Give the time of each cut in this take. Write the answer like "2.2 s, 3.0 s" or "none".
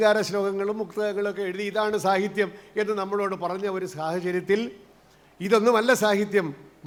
none